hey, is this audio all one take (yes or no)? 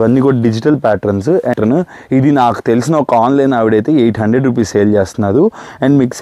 no